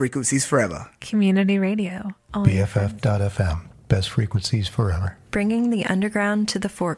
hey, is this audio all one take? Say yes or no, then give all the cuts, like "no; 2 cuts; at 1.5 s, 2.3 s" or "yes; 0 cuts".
yes; 0 cuts